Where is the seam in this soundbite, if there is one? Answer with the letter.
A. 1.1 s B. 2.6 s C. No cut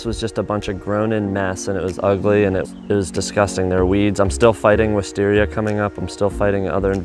B